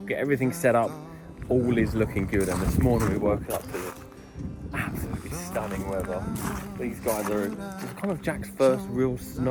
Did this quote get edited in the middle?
no; 0 cuts

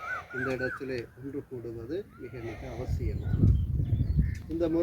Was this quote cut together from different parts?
no; 0 cuts

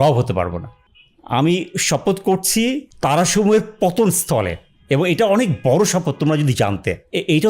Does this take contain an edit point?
yes; 2 cuts; at 0.9 s, 2.9 s

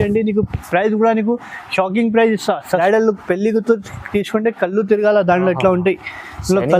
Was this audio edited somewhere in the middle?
yes; 1 cut; at 2.8 s

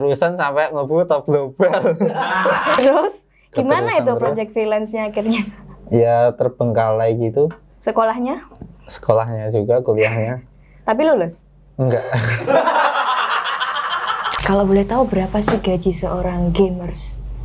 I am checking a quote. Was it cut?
yes; 2 cuts; at 2.8 s, 14.4 s

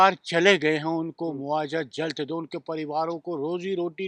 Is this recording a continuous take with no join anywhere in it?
yes; 0 cuts

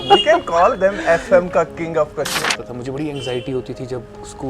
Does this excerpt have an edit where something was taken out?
yes; 1 cut; at 2.5 s

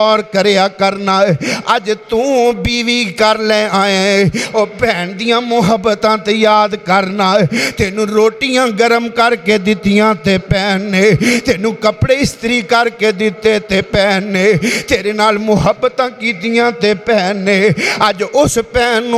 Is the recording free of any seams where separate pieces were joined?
yes; 0 cuts

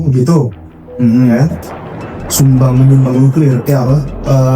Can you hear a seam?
no; 0 cuts

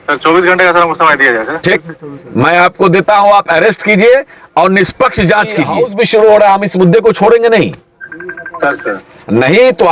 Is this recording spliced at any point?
yes; 1 cut; at 5.7 s

